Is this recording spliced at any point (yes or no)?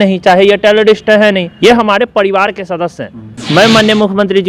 yes